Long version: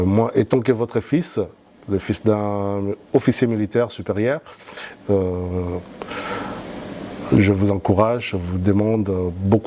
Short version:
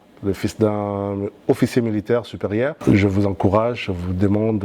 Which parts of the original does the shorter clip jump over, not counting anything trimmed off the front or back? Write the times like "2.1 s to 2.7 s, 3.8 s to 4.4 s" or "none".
4.4 s to 7.2 s